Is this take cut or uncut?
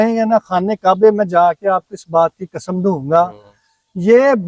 uncut